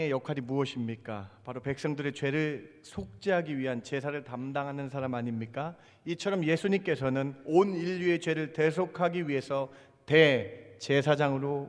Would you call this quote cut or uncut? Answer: uncut